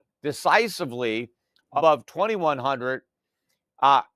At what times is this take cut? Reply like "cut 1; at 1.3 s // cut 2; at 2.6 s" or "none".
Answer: cut 1; at 1.8 s

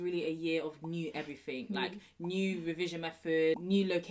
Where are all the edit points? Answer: none

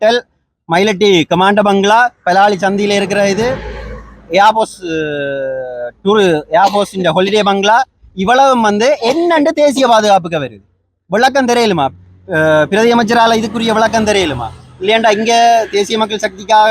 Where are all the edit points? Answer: none

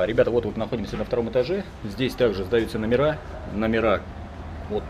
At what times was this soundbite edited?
none

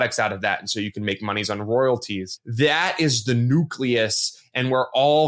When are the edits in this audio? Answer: cut 1; at 2.4 s

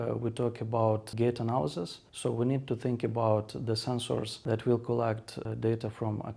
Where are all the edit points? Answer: cut 1; at 1.1 s // cut 2; at 4.3 s // cut 3; at 5.4 s

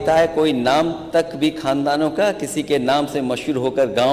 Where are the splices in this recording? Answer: none

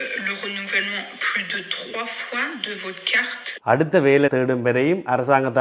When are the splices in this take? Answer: cut 1; at 3.6 s

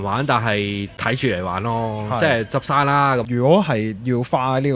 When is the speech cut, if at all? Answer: cut 1; at 0.9 s // cut 2; at 3.2 s

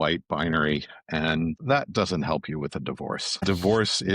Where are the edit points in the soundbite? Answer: cut 1; at 1.6 s // cut 2; at 3.4 s

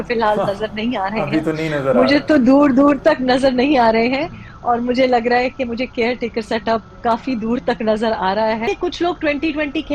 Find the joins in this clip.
cut 1; at 8.6 s

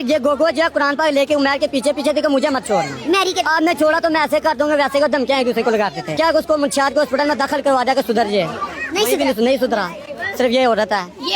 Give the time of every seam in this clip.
cut 1; at 6.2 s

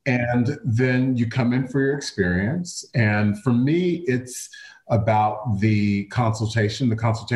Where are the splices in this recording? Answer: none

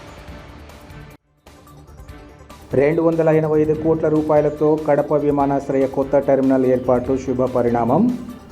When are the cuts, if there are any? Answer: cut 1; at 2.3 s

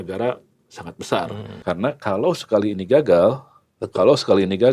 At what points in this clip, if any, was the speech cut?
cut 1; at 1.4 s

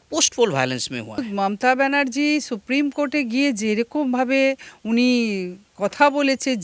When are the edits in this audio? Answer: cut 1; at 1.2 s

